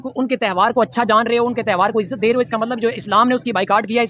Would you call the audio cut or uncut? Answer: uncut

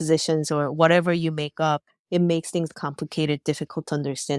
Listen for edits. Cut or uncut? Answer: uncut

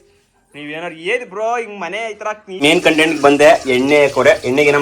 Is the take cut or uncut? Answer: cut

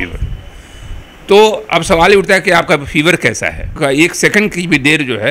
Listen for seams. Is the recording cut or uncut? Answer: cut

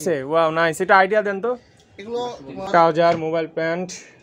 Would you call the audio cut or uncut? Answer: cut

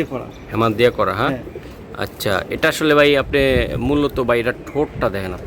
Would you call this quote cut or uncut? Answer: uncut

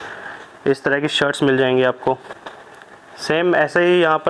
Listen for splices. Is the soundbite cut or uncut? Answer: uncut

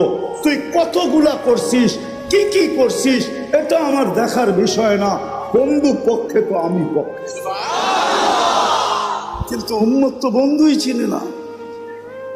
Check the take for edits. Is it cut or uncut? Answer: cut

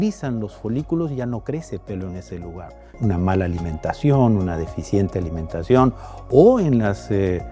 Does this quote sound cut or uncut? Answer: cut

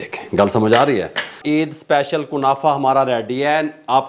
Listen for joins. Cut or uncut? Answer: cut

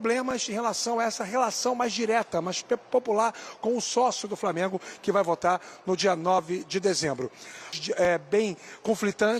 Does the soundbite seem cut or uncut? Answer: cut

